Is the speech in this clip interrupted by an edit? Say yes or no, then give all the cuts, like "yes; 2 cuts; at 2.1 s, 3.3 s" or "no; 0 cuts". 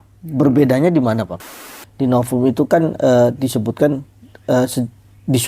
yes; 1 cut; at 1.4 s